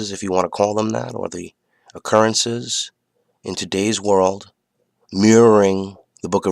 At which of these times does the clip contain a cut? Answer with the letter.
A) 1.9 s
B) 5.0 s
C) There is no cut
A